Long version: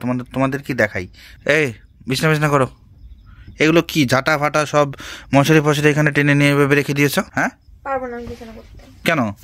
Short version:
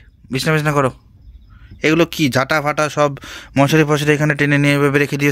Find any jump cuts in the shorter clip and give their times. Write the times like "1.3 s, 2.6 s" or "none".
none